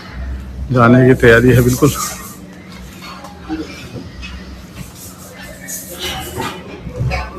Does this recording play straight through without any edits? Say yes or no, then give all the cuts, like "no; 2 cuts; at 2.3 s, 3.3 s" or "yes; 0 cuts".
yes; 0 cuts